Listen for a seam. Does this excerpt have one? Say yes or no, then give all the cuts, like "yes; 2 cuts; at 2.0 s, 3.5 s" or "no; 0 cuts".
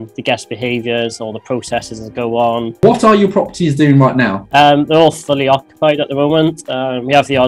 yes; 2 cuts; at 2.8 s, 4.4 s